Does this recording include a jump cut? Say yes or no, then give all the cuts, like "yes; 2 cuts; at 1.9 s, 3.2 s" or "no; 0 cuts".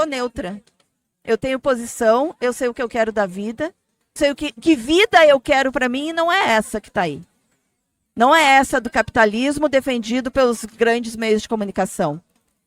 yes; 1 cut; at 4.2 s